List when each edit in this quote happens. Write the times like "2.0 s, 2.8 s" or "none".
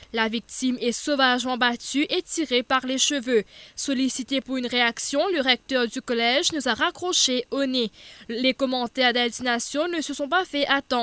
3.5 s